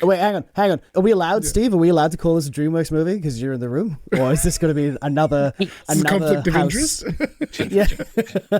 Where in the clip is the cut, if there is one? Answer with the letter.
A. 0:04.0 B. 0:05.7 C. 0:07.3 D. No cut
A